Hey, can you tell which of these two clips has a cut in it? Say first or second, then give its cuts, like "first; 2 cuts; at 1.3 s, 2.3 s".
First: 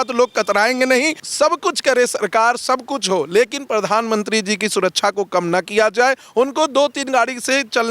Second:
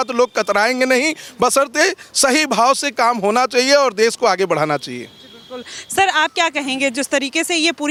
first; 1 cut; at 1.2 s